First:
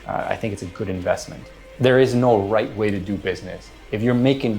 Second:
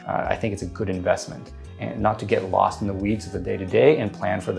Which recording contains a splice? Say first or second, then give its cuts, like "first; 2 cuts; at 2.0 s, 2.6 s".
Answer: first; 1 cut; at 1.6 s